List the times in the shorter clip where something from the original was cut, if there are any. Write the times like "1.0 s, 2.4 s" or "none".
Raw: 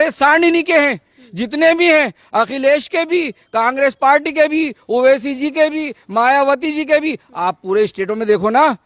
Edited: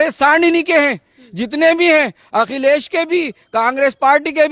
none